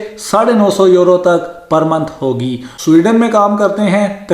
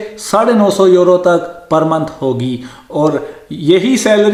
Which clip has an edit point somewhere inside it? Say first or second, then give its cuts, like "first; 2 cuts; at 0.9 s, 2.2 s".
first; 1 cut; at 2.7 s